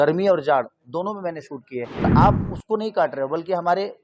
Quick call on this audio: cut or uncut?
cut